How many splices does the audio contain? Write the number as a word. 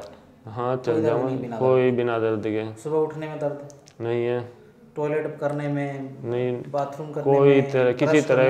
zero